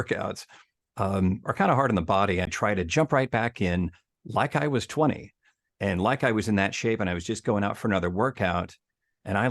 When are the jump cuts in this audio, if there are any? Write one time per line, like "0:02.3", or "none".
0:02.5